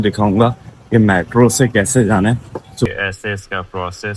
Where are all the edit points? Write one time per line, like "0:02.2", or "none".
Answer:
0:02.9